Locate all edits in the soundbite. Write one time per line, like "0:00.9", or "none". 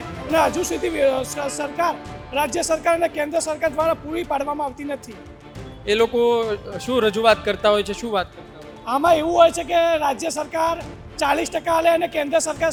none

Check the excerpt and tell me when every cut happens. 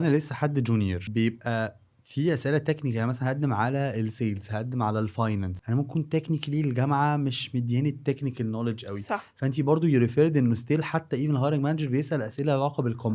0:01.0
0:05.6

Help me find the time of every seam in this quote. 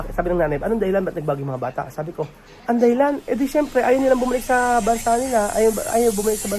0:02.5

